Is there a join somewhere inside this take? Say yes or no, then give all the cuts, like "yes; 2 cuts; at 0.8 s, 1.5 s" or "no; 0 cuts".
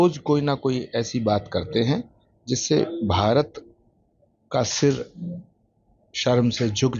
no; 0 cuts